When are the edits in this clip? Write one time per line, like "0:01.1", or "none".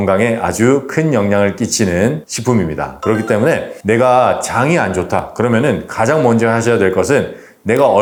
none